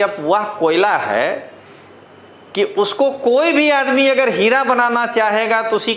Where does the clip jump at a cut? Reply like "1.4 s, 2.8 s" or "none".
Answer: none

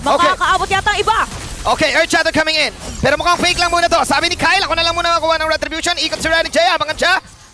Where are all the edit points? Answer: none

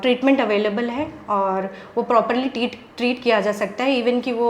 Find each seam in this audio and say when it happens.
none

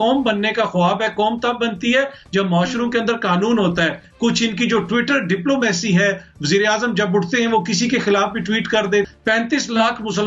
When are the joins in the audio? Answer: 4.0 s, 9.1 s

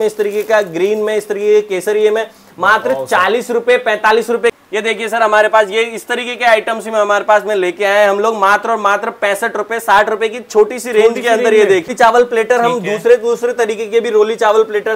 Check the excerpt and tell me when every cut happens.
4.5 s, 11.9 s

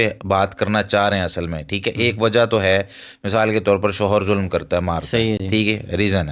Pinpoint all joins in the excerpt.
none

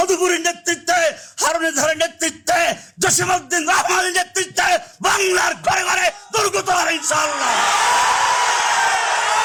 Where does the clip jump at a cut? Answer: none

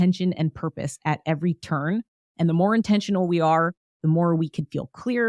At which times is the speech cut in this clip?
2.2 s

